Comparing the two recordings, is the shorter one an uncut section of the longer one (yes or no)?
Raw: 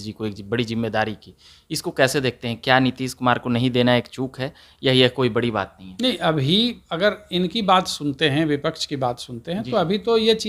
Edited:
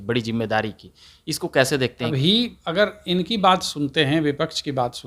no